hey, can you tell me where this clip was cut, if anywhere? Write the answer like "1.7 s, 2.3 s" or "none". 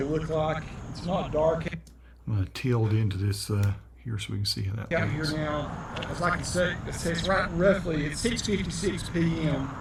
none